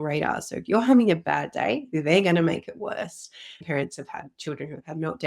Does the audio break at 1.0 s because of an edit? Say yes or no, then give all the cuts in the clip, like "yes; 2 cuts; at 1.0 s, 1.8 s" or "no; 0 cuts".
no; 1 cut; at 3.5 s